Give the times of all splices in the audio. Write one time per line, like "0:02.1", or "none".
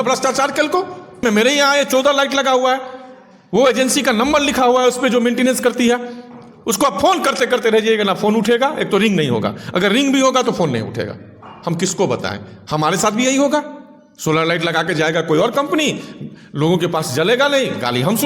0:01.2

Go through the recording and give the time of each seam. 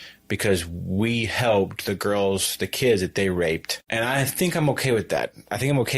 0:03.8

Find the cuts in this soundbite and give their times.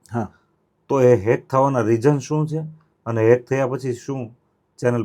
none

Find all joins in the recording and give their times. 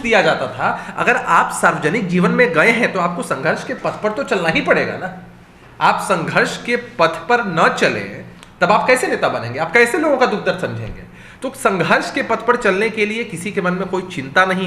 none

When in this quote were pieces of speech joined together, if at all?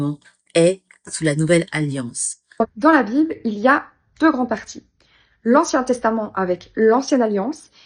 0:02.8

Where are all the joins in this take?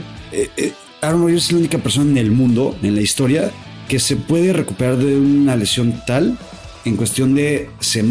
none

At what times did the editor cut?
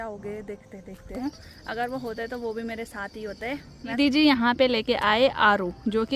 0:01.2
0:04.0

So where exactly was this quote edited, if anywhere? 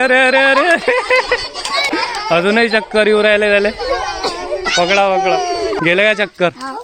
0:01.9
0:05.8

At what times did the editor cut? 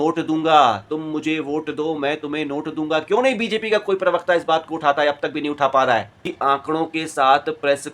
0:06.2

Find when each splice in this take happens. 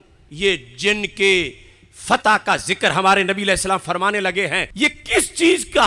0:04.7

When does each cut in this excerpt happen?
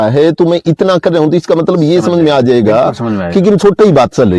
none

